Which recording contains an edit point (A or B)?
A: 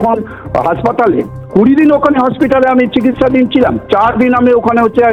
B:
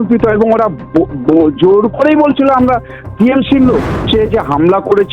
B